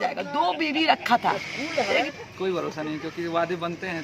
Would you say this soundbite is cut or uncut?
cut